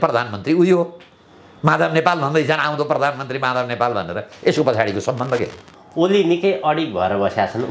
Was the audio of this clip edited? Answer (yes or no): yes